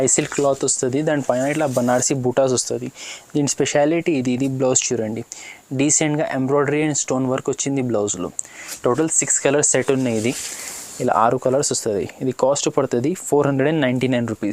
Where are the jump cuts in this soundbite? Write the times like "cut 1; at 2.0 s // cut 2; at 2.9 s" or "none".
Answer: none